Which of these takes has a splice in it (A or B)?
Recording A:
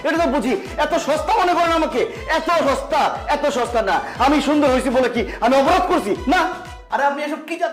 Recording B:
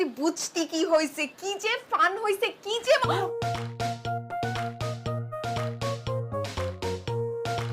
A